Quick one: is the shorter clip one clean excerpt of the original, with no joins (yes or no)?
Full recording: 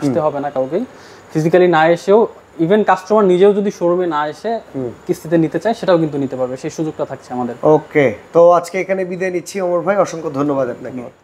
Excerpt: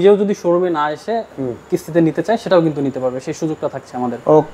yes